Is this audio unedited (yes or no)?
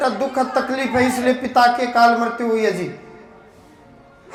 yes